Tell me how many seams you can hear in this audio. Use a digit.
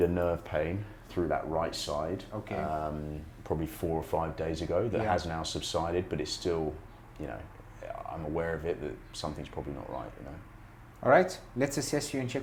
0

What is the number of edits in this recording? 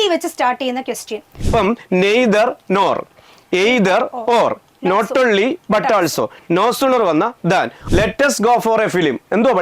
2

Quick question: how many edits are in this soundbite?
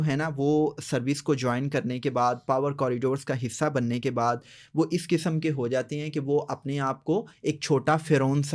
0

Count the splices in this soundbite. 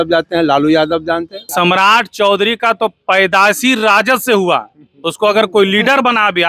1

